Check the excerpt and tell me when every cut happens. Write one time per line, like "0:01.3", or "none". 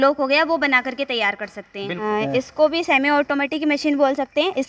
0:02.0